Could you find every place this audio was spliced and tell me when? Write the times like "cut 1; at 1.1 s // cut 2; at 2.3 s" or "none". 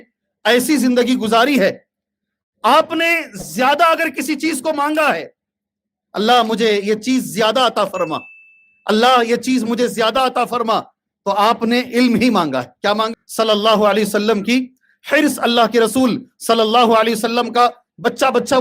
cut 1; at 13.1 s